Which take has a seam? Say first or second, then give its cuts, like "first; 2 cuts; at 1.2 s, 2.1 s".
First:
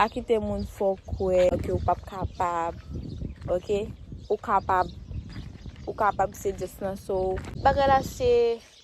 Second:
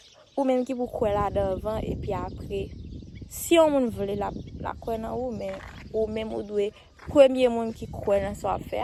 first; 2 cuts; at 1.5 s, 7.6 s